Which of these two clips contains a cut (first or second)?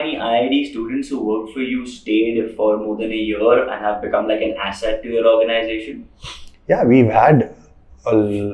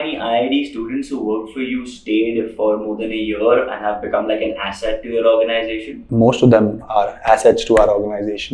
second